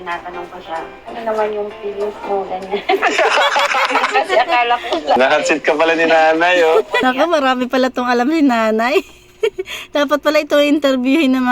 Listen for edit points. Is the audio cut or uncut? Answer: cut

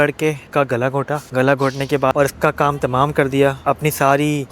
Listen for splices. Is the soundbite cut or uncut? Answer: cut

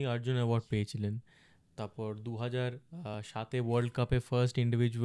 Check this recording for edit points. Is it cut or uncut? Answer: uncut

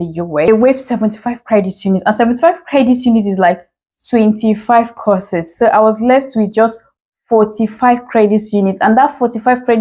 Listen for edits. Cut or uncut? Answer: uncut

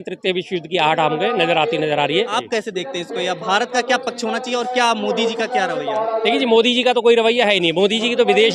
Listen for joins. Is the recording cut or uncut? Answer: cut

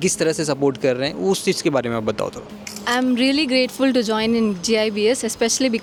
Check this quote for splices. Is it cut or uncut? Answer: uncut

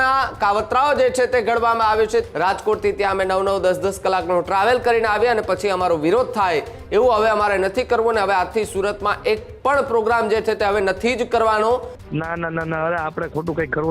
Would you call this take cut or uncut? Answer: cut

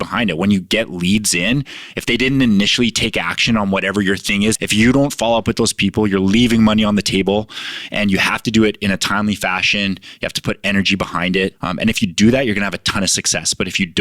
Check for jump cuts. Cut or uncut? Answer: cut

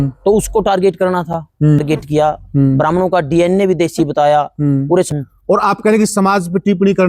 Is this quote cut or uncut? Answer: cut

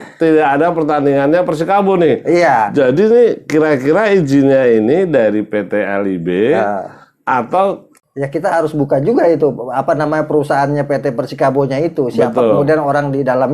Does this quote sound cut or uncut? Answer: cut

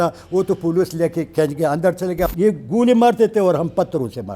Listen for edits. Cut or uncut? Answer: cut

